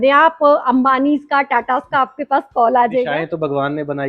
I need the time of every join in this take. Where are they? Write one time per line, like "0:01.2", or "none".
0:03.1